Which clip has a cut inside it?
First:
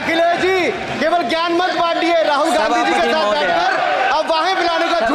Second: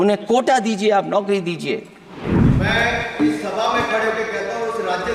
second; 1 cut; at 2.2 s

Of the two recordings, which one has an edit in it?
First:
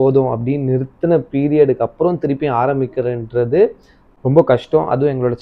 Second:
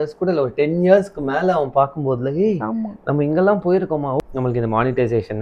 second; 1 cut; at 4.2 s

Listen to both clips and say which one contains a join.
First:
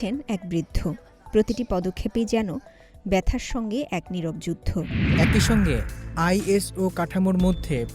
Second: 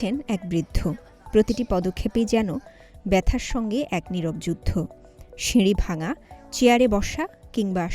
first; 1 cut; at 5.0 s

